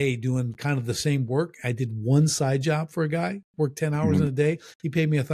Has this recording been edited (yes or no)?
no